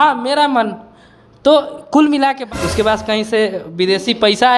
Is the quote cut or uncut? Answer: cut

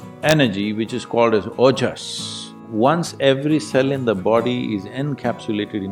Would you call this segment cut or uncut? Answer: cut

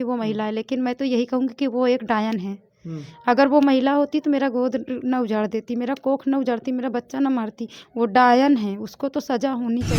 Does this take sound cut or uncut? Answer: uncut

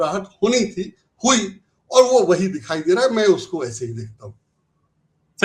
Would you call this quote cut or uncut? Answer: uncut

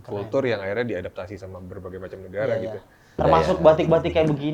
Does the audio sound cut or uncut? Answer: cut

